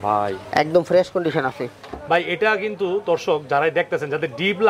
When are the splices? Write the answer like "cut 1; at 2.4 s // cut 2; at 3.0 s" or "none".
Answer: none